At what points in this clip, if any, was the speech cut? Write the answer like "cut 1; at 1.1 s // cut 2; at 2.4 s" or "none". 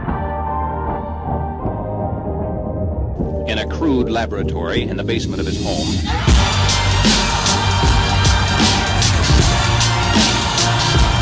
none